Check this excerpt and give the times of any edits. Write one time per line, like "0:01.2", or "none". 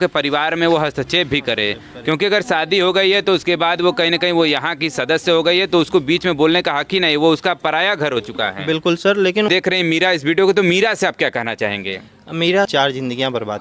0:09.5
0:12.7